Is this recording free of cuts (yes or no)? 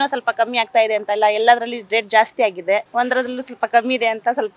yes